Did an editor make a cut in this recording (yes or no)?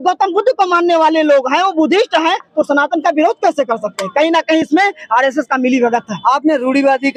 no